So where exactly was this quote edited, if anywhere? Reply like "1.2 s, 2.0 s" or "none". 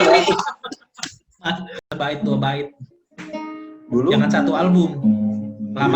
1.8 s